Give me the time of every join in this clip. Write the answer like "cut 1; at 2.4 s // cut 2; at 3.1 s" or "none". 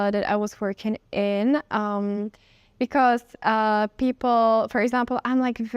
none